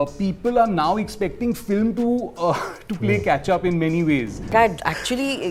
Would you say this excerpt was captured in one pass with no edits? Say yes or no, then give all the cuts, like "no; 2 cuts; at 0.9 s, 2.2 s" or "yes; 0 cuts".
no; 1 cut; at 4.5 s